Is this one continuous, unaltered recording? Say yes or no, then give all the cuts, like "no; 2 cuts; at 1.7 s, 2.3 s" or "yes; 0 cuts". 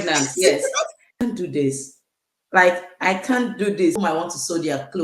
no; 2 cuts; at 1.2 s, 4.0 s